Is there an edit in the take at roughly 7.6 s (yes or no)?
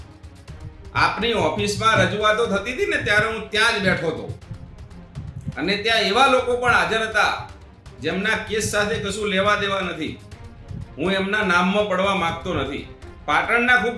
no